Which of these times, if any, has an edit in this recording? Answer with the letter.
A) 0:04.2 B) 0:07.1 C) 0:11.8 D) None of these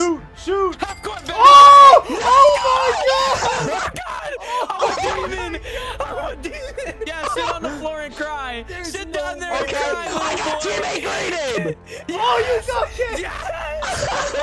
B